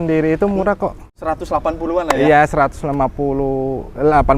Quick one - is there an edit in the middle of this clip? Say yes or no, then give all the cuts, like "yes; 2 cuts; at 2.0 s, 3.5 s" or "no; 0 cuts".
yes; 1 cut; at 1.1 s